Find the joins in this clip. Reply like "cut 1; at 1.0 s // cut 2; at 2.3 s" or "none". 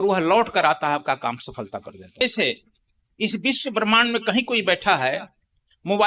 cut 1; at 2.2 s